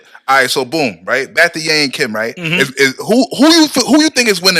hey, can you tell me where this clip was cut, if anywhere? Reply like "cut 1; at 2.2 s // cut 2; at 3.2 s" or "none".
none